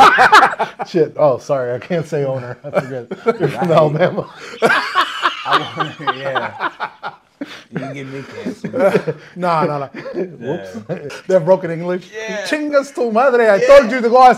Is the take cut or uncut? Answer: cut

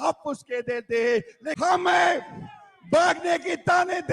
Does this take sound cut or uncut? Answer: cut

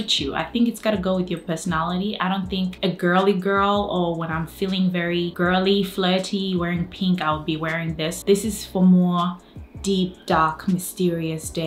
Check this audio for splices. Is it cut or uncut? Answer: cut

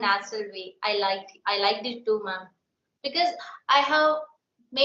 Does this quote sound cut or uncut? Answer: uncut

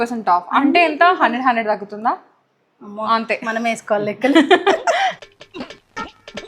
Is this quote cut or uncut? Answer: uncut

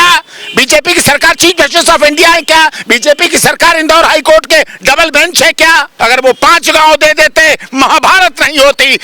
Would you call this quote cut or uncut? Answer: cut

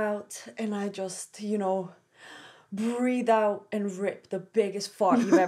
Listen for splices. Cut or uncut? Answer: uncut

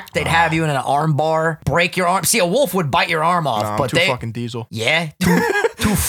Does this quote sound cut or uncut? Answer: cut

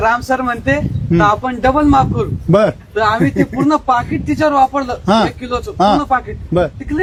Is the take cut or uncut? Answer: uncut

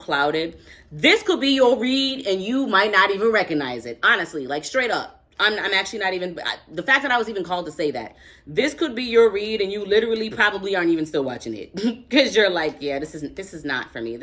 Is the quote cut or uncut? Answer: uncut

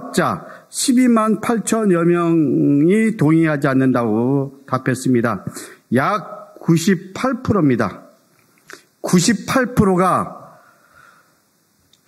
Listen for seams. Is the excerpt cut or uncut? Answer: uncut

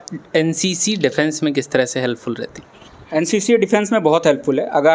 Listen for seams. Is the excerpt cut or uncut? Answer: uncut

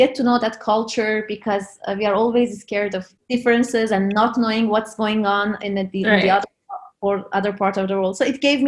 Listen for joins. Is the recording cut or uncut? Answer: uncut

